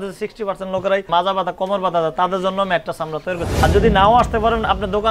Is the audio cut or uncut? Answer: cut